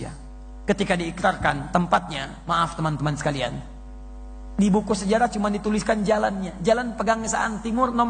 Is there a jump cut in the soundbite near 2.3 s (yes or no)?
no